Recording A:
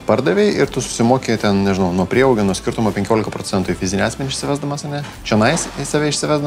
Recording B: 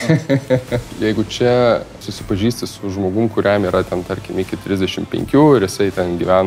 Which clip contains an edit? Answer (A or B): B